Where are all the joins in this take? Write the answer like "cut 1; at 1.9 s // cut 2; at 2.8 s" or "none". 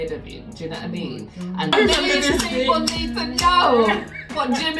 cut 1; at 1.7 s